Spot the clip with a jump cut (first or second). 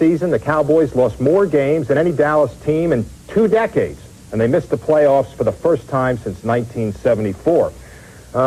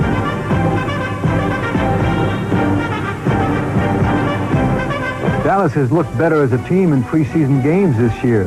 second